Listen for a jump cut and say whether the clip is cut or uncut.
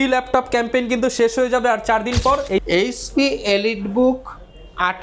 cut